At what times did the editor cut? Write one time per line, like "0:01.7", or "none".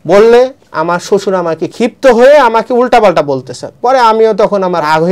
0:01.7